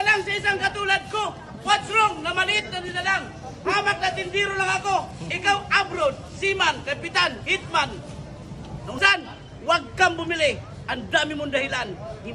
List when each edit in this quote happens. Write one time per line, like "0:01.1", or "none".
0:09.0